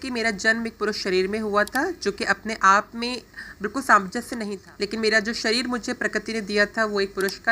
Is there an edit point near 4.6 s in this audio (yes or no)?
yes